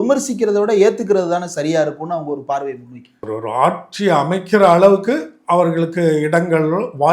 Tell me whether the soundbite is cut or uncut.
uncut